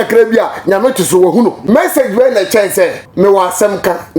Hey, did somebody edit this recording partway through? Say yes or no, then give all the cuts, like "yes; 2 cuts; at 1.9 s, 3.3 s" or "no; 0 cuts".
yes; 2 cuts; at 1.6 s, 3.0 s